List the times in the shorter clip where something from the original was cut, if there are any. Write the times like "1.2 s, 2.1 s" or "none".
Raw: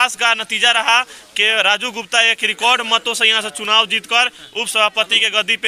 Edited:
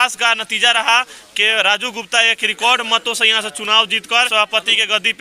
4.3 s